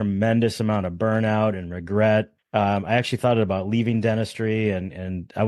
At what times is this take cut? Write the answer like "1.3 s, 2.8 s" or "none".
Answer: 2.4 s